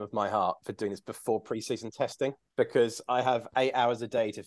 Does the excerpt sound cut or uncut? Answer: cut